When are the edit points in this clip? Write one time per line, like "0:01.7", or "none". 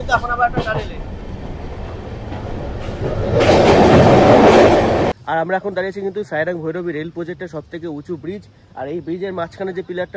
0:05.1